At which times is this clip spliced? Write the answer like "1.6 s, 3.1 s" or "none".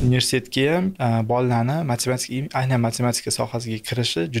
1.0 s